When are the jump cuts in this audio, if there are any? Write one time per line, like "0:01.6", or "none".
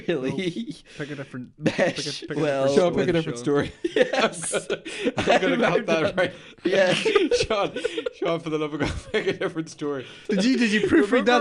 0:10.2

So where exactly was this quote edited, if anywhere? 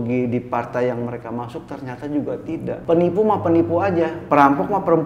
0:02.8
0:04.2

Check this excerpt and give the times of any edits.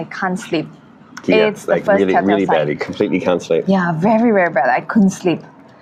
none

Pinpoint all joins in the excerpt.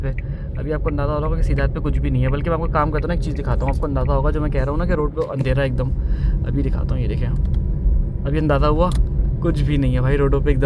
none

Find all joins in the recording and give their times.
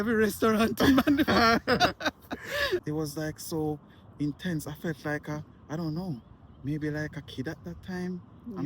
0:02.8

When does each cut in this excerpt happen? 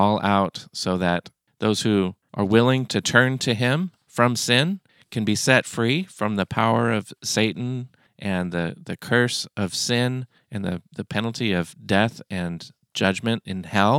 0:01.4
0:02.2

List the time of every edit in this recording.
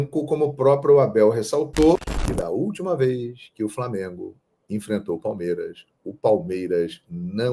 0:02.0

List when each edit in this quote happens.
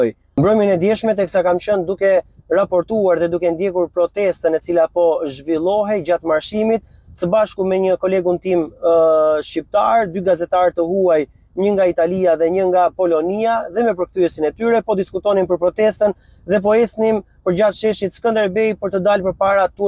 none

